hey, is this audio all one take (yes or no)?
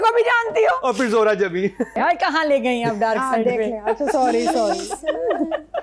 no